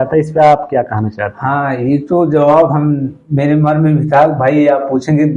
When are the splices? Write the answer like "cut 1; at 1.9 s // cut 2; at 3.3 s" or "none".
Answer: none